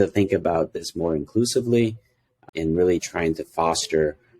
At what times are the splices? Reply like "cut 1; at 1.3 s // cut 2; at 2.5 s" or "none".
cut 1; at 2.4 s